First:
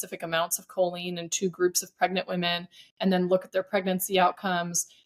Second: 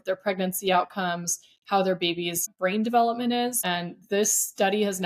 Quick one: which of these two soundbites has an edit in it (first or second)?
second